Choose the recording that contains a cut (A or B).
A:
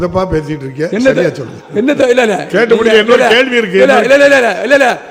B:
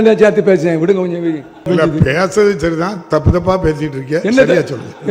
B